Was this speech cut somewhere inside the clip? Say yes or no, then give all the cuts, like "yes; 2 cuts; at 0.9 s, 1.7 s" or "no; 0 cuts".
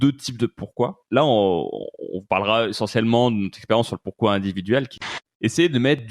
yes; 2 cuts; at 1.0 s, 5.0 s